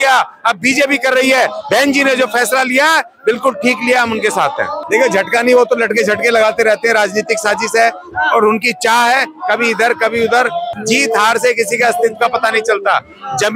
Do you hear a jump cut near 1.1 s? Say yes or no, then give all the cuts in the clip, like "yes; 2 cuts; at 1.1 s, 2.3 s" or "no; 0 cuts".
no; 2 cuts; at 4.8 s, 10.7 s